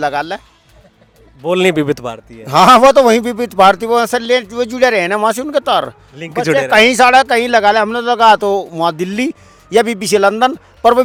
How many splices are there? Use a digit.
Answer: 0